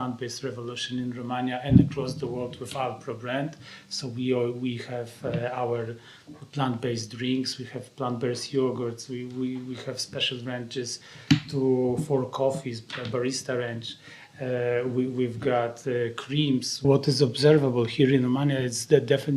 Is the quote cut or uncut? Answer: cut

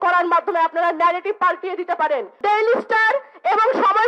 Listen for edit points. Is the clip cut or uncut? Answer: cut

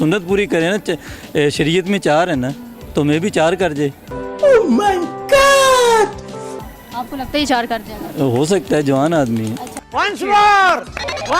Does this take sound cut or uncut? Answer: uncut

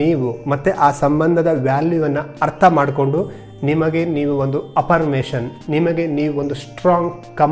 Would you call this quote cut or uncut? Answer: uncut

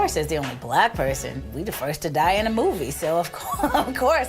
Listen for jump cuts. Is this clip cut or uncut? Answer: cut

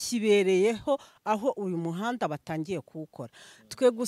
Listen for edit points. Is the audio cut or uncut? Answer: uncut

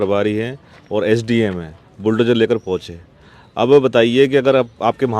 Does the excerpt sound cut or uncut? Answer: uncut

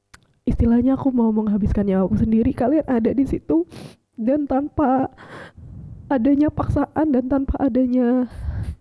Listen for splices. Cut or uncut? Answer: uncut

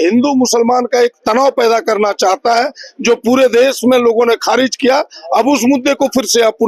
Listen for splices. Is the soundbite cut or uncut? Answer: uncut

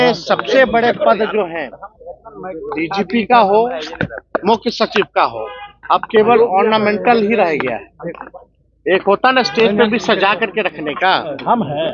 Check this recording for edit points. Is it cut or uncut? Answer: uncut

